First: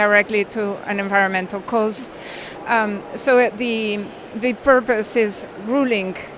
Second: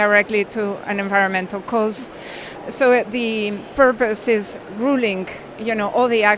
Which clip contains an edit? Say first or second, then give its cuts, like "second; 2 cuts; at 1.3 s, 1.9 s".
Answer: second; 2 cuts; at 2.6 s, 3.7 s